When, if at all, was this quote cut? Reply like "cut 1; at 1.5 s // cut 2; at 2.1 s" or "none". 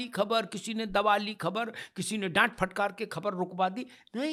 none